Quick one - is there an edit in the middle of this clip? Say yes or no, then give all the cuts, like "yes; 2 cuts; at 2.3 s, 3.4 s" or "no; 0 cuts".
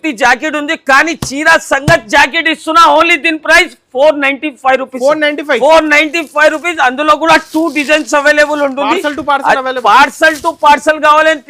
no; 0 cuts